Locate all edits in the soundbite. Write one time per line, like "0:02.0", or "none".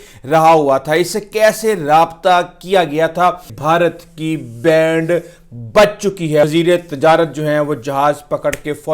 0:03.5
0:06.4